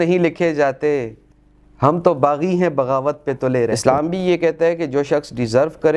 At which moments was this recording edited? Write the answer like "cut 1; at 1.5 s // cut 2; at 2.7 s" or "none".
cut 1; at 3.8 s